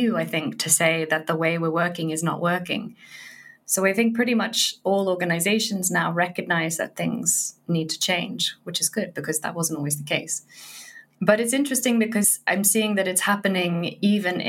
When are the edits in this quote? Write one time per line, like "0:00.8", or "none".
0:12.4